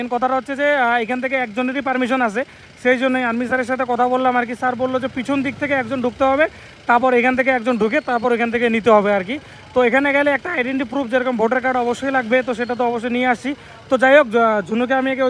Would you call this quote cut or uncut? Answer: uncut